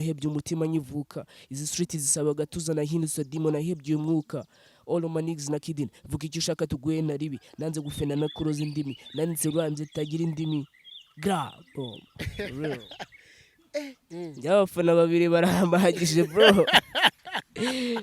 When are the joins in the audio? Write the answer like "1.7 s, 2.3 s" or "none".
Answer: 14.0 s